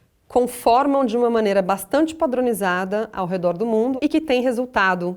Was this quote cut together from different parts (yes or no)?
yes